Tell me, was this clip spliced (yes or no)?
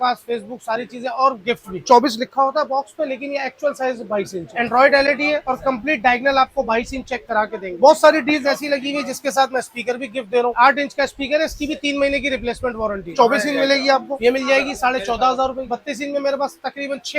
yes